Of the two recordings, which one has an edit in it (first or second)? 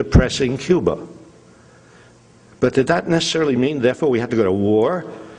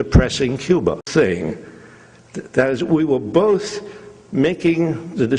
first